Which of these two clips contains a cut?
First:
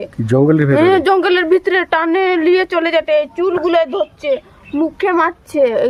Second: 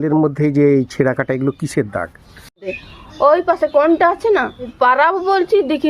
second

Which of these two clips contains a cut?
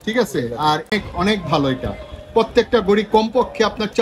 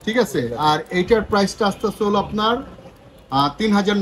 first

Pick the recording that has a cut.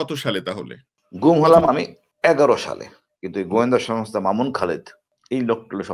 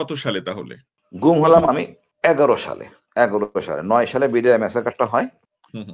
first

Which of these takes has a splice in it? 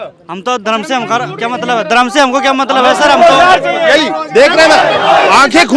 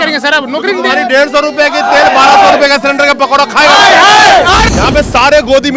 second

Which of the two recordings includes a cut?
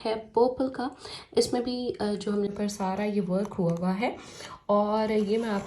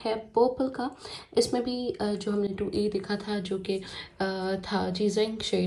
first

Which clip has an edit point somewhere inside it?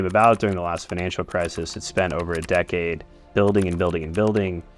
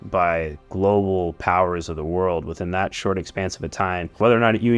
first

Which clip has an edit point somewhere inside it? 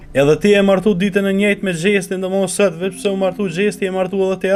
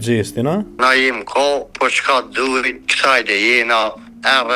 second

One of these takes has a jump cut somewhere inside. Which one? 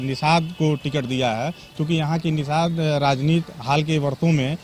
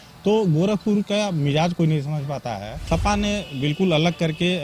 second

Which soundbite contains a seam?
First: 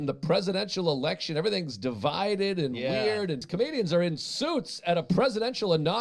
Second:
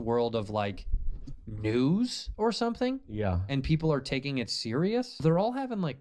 first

